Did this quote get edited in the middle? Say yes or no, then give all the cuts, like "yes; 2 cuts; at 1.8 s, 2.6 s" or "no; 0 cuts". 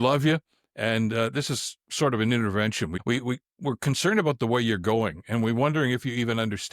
yes; 1 cut; at 2.9 s